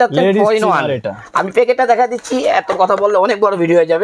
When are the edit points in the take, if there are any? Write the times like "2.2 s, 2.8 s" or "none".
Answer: none